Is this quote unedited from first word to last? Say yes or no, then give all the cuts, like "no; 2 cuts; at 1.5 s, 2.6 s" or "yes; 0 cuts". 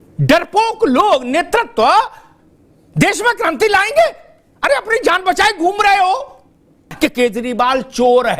no; 1 cut; at 6.9 s